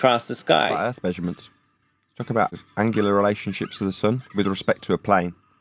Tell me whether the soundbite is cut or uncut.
cut